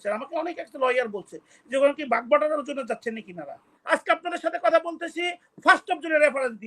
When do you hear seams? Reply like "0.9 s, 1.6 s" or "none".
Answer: 3.7 s